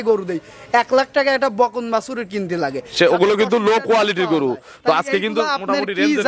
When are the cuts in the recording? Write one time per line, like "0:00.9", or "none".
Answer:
none